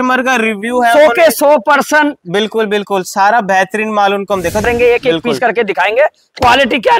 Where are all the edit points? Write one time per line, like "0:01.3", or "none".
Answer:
0:04.6